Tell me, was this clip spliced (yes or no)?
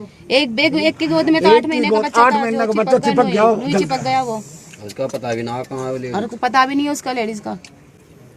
no